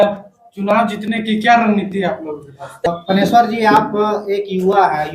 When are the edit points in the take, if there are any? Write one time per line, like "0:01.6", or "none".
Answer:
0:02.9